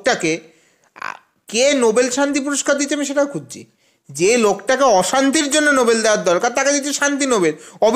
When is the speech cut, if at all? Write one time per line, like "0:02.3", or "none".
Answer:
none